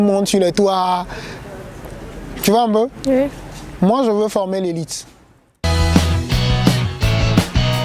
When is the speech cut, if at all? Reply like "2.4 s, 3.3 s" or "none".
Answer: 5.6 s